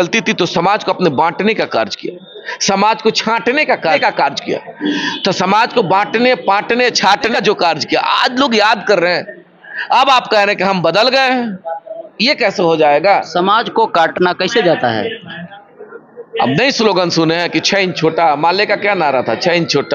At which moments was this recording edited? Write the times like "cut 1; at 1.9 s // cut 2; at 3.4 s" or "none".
cut 1; at 4.0 s // cut 2; at 7.3 s // cut 3; at 14.1 s